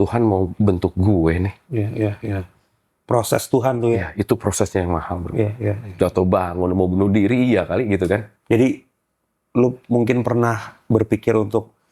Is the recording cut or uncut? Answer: cut